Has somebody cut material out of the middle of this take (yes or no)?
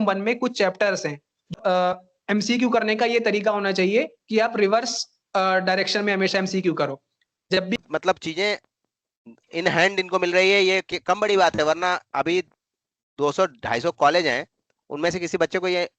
yes